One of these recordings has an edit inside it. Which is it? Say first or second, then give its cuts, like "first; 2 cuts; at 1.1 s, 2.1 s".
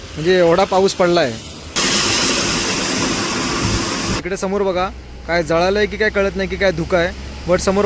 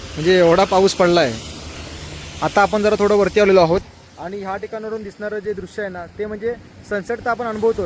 first; 2 cuts; at 1.8 s, 4.2 s